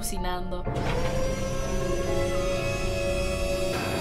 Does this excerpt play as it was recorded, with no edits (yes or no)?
yes